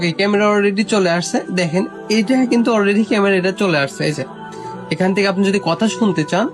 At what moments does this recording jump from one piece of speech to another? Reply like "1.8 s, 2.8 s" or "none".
none